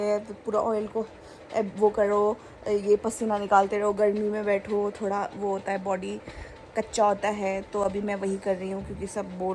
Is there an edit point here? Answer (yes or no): no